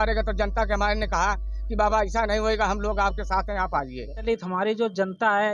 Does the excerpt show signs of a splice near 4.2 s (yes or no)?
yes